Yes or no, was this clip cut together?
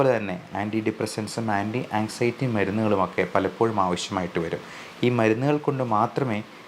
no